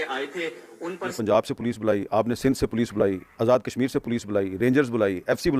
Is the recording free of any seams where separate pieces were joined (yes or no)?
no